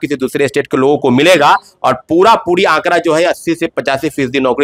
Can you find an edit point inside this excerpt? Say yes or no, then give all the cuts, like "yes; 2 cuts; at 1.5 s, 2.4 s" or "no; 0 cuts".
no; 0 cuts